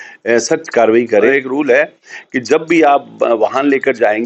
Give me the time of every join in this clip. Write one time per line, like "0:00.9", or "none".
0:01.3